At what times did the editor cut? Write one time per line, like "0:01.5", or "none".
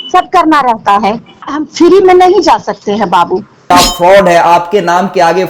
0:01.5
0:03.7